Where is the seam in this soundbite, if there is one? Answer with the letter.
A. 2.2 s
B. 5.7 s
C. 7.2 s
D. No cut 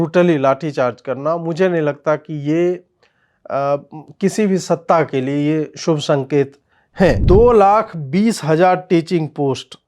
C